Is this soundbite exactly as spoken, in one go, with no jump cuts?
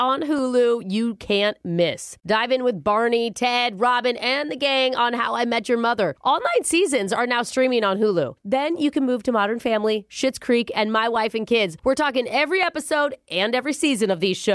yes; 0 cuts

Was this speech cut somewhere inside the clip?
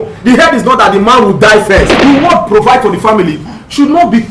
yes; 1 cut; at 1.9 s

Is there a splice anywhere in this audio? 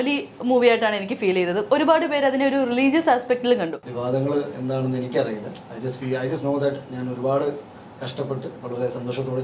yes; 1 cut; at 3.8 s

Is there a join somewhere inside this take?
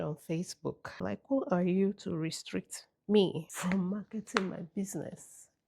yes; 1 cut; at 0.9 s

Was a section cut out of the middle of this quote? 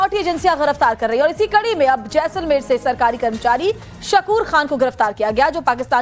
no; 0 cuts

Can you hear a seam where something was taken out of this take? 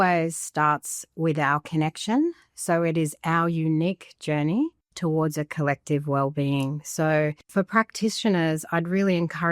yes; 1 cut; at 7.4 s

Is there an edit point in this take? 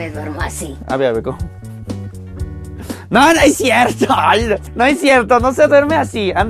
no; 0 cuts

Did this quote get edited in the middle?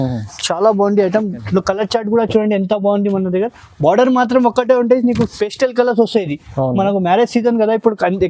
yes; 1 cut; at 1.4 s

